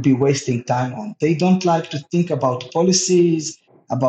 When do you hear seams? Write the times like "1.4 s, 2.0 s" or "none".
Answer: none